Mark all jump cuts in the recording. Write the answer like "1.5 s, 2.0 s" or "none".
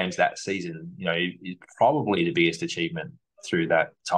none